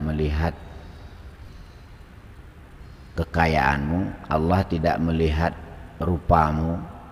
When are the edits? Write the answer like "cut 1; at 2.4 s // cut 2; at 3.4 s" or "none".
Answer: none

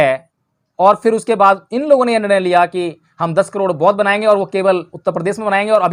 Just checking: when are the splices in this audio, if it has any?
none

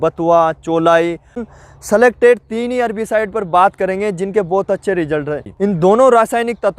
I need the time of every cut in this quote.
cut 1; at 1.4 s // cut 2; at 5.4 s

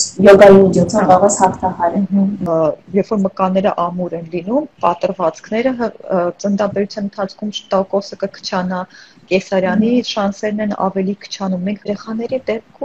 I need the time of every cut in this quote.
cut 1; at 2.5 s // cut 2; at 11.8 s

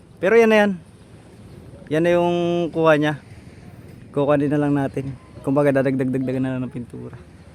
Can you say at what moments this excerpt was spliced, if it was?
none

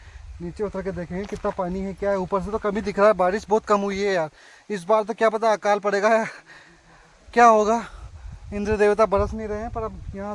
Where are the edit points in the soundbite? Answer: cut 1; at 8.3 s

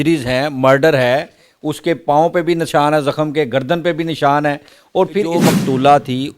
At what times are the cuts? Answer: cut 1; at 5.3 s

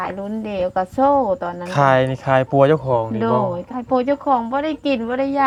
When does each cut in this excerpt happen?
none

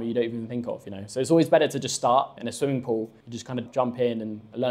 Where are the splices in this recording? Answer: cut 1; at 2.4 s // cut 2; at 3.7 s

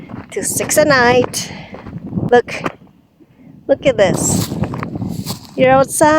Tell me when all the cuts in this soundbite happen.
cut 1; at 2.3 s

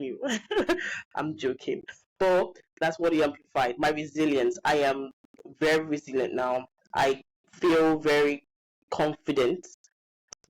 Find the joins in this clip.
cut 1; at 2.7 s

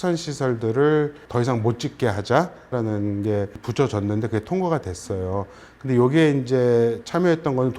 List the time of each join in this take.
cut 1; at 1.2 s // cut 2; at 2.7 s // cut 3; at 3.6 s

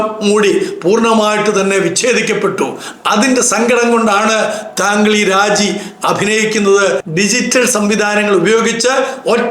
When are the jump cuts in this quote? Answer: cut 1; at 7.0 s

